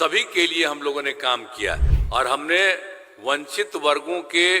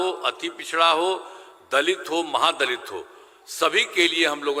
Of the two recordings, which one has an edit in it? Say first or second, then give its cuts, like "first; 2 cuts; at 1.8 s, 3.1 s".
first; 1 cut; at 1.9 s